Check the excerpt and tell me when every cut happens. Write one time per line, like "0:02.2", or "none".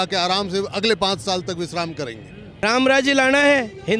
0:02.5